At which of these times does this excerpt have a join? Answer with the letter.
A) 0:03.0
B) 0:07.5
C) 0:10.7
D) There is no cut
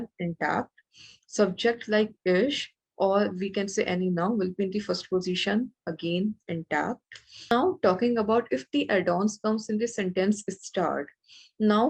B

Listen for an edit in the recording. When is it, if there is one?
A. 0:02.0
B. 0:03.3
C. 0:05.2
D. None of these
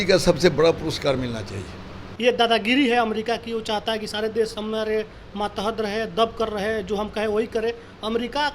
A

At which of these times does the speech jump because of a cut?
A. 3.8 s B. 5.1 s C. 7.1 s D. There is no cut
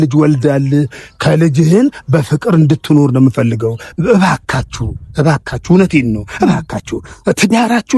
A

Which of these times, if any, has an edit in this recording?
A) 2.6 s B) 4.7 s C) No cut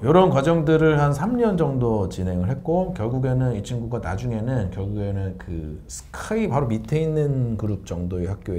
C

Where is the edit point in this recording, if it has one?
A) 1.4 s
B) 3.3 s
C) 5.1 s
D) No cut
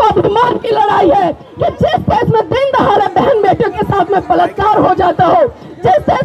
A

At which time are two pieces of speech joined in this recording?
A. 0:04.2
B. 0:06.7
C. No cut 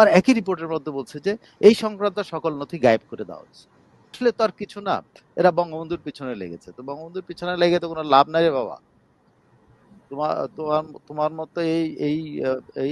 A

